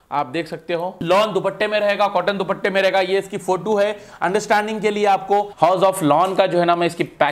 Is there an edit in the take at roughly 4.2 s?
no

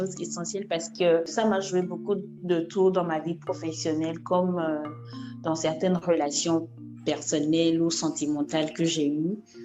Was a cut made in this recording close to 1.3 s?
yes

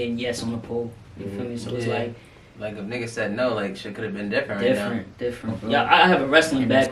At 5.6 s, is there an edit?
yes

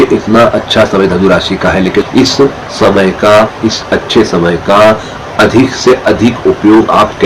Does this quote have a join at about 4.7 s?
no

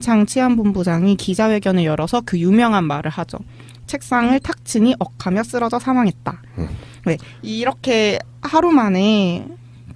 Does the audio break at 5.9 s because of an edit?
no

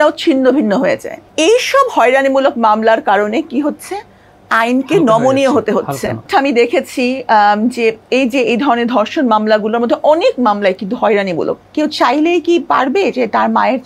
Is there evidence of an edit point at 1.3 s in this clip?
yes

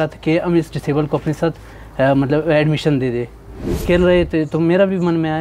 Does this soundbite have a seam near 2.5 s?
no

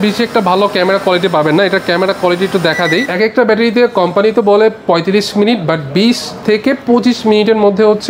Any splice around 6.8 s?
no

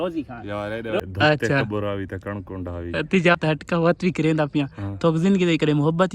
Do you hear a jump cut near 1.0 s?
yes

